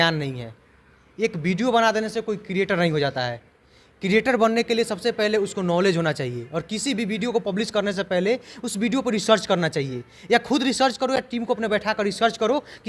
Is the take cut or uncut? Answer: uncut